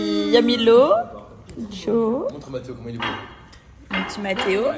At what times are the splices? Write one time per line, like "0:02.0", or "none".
none